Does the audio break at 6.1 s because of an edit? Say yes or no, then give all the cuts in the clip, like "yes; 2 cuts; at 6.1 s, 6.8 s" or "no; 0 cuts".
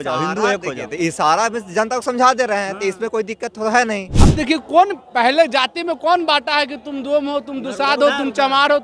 no; 1 cut; at 4.1 s